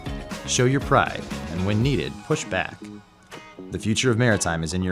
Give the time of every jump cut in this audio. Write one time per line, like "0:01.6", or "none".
0:02.7